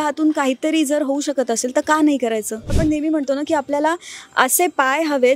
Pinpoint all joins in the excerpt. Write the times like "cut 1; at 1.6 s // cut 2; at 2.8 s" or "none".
cut 1; at 2.7 s